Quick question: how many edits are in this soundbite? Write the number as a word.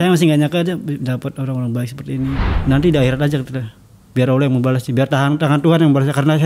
one